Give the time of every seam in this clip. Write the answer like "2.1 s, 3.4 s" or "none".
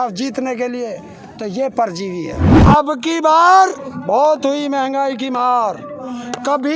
2.5 s